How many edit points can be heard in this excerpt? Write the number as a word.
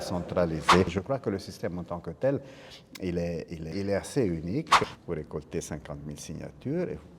three